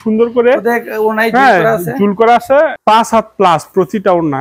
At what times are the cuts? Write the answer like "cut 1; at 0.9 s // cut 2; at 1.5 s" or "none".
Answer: cut 1; at 2.8 s